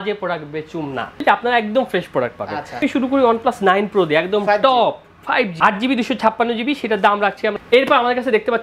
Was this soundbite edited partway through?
yes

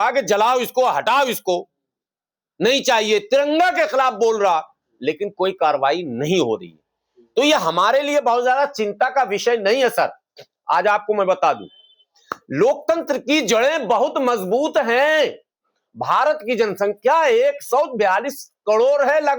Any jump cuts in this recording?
no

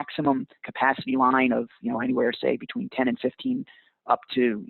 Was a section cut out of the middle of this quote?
no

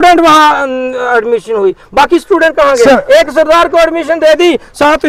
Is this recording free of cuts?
yes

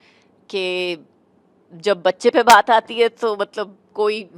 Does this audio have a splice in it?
no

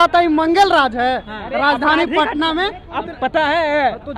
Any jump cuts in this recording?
yes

